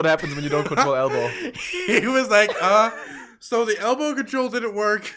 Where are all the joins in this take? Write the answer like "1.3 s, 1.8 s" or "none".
none